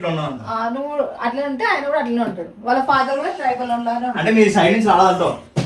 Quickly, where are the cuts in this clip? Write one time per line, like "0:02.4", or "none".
none